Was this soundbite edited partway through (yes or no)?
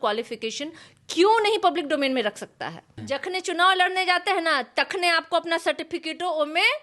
yes